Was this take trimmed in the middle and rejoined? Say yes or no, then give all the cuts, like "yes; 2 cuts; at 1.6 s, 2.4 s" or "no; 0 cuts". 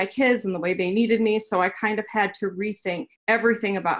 yes; 1 cut; at 3.1 s